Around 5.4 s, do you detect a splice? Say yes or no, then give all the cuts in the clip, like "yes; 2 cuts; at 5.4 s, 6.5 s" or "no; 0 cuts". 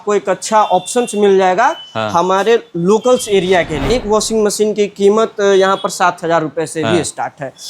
no; 1 cut; at 3.8 s